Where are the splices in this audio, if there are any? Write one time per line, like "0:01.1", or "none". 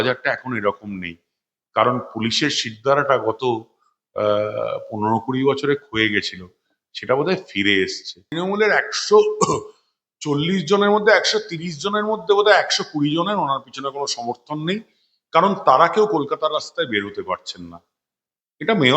0:08.4